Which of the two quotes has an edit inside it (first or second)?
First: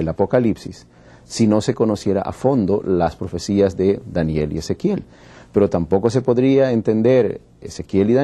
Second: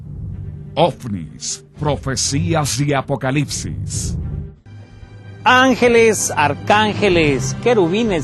first